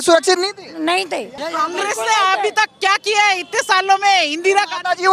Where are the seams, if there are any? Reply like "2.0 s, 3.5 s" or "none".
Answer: 1.4 s